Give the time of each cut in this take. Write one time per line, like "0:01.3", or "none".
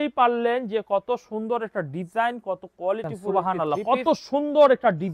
0:03.2